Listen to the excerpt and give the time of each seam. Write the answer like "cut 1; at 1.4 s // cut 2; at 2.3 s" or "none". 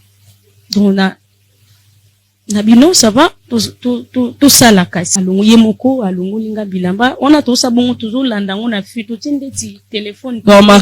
cut 1; at 5.1 s